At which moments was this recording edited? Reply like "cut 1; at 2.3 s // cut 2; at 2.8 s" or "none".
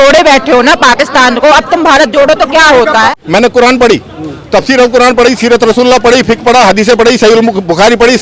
cut 1; at 3.1 s